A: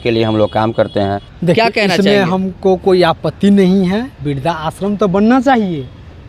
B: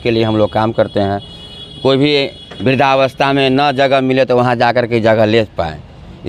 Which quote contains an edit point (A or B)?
A